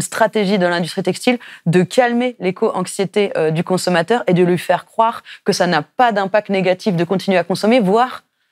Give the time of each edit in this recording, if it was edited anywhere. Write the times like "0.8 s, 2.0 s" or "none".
none